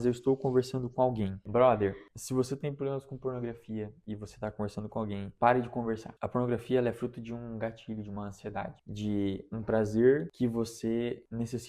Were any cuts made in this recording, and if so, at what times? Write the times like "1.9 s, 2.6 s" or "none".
1.4 s